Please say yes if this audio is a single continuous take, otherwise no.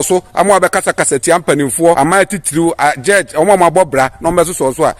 no